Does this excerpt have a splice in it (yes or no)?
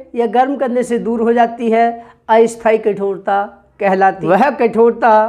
yes